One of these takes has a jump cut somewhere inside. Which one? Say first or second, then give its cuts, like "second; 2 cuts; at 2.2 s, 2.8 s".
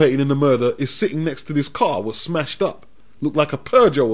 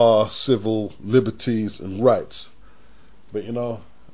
second; 1 cut; at 1.5 s